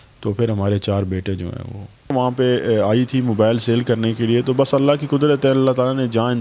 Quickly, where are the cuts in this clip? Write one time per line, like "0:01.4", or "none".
0:02.1